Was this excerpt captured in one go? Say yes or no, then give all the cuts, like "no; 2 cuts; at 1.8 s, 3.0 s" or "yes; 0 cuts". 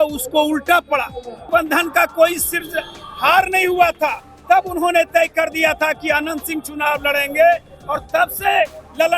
no; 1 cut; at 1.4 s